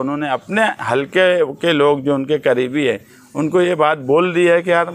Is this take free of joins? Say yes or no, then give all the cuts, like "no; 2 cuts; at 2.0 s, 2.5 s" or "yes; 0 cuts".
yes; 0 cuts